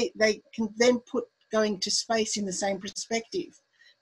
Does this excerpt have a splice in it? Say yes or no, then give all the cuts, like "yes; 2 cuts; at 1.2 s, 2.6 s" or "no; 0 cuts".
yes; 1 cut; at 2.9 s